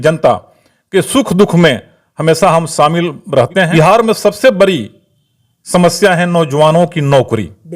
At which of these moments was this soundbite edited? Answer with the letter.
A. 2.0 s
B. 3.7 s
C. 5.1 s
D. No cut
B